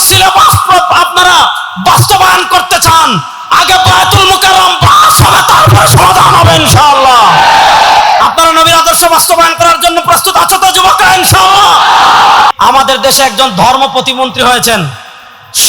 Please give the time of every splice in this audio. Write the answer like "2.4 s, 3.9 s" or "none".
12.5 s